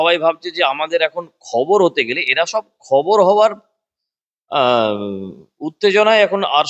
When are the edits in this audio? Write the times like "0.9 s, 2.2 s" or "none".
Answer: none